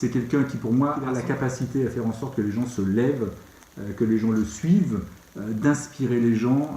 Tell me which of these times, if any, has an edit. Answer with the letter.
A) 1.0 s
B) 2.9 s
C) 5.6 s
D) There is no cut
A